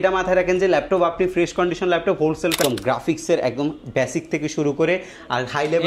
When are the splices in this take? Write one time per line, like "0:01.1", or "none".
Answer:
0:02.6